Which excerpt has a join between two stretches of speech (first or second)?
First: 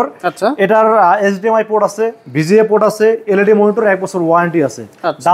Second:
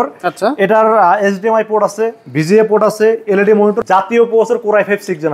second